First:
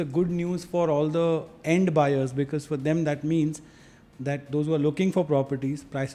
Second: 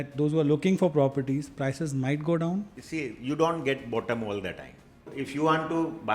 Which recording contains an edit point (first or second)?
second